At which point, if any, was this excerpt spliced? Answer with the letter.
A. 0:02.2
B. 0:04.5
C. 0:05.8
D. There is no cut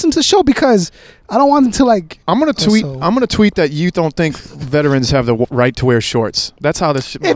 A